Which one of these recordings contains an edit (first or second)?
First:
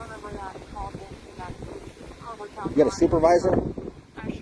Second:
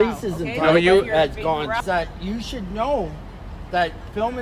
second